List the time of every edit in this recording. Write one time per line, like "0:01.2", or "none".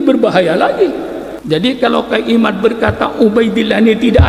0:01.3